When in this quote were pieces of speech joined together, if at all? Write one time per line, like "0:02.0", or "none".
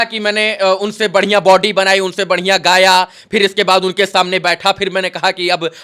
none